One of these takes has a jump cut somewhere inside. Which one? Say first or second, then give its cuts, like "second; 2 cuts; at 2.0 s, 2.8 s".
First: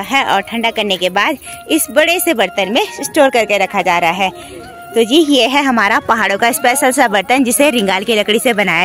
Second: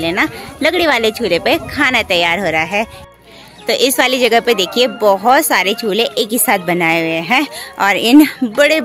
second; 1 cut; at 3.0 s